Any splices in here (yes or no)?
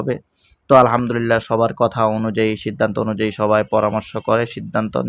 no